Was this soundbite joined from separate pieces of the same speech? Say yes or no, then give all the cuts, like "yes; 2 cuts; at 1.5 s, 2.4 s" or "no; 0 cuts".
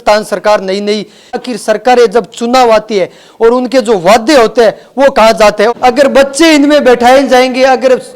yes; 2 cuts; at 1.4 s, 5.7 s